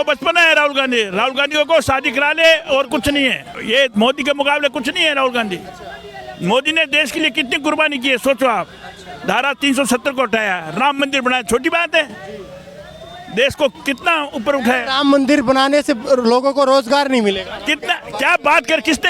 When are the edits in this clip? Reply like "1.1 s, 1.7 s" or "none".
3.6 s